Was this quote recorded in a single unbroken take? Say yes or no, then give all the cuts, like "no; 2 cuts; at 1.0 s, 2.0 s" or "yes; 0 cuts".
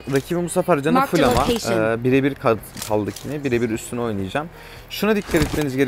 yes; 0 cuts